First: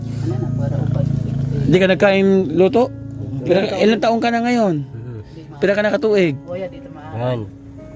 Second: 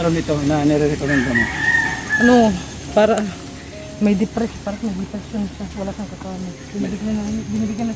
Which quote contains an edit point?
first; 1 cut; at 3.4 s

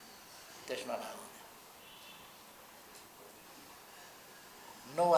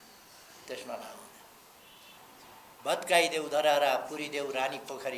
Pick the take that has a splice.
second; 1 cut; at 2.2 s

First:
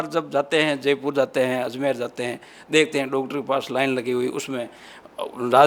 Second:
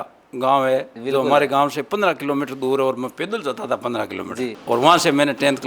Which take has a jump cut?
second; 1 cut; at 4.6 s

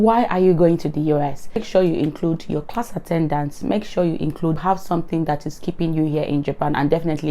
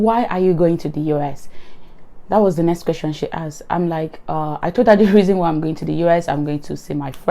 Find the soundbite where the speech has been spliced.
first; 2 cuts; at 1.6 s, 4.6 s

